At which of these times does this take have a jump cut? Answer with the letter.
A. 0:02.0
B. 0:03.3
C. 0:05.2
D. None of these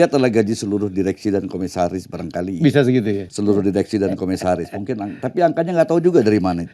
B